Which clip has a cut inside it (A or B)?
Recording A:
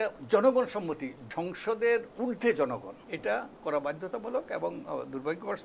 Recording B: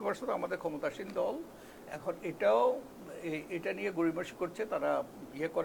A